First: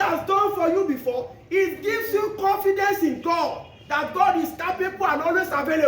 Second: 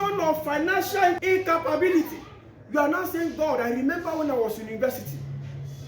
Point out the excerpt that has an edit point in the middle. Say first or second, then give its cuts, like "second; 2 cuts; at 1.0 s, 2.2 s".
second; 1 cut; at 1.2 s